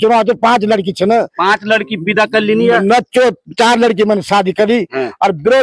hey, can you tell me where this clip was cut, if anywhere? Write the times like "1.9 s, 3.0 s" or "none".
none